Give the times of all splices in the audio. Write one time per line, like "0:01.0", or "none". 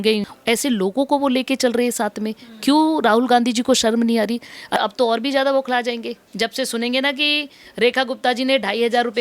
0:04.8